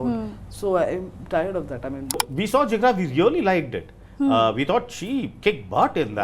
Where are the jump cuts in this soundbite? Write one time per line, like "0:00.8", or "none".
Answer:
0:02.2